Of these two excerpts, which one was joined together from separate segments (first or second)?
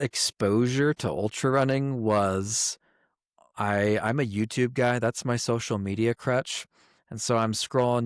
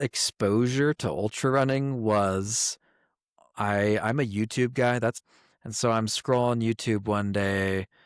second